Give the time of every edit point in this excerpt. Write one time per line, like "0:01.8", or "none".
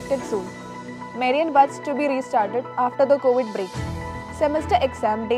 none